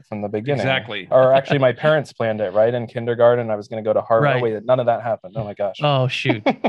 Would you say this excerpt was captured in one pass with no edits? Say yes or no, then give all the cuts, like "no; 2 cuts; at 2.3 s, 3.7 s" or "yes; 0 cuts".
yes; 0 cuts